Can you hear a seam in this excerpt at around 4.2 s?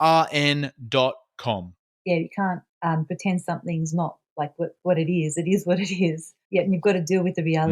no; 1 cut; at 1.8 s

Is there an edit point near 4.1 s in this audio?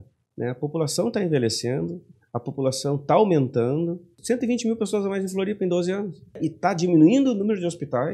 yes; 2 cuts; at 4.1 s, 6.4 s

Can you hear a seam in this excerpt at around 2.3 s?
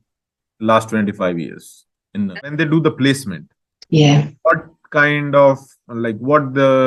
yes; 1 cut; at 2.3 s

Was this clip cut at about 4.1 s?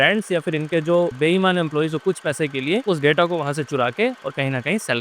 no; 2 cuts; at 1.1 s, 2.8 s

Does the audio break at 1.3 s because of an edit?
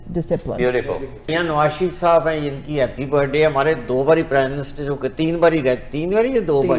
yes; 1 cut; at 1.3 s

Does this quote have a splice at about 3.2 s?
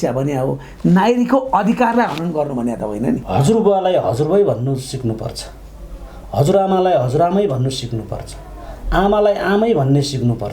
yes; 1 cut; at 3.2 s

